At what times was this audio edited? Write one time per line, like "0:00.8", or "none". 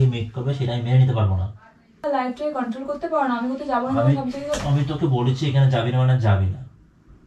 0:02.0